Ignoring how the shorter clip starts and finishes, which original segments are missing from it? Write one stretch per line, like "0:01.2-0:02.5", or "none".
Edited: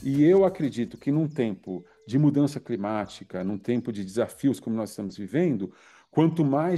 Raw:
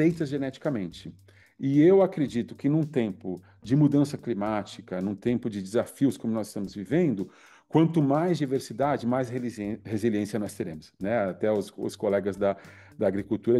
none

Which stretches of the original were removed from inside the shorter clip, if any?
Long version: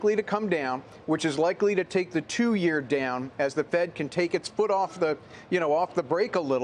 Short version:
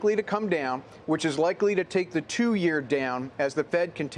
none

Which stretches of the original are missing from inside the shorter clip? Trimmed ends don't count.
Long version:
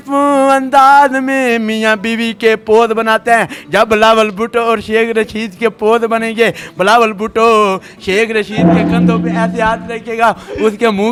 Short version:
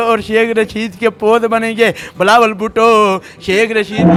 none

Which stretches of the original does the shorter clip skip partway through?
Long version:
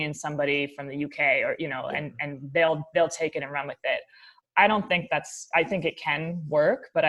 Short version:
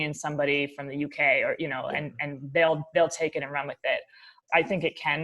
0:04.3-0:05.3

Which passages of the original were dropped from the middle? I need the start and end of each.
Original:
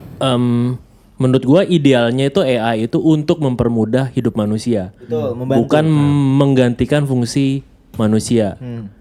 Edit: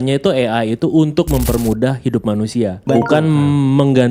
0:04.9-0:05.4

